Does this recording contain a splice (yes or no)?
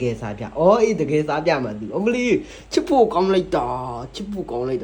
no